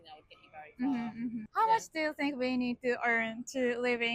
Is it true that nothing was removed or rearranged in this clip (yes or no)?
no